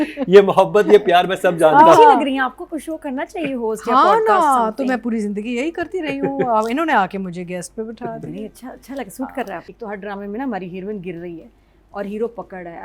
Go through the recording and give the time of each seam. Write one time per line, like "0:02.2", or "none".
0:09.7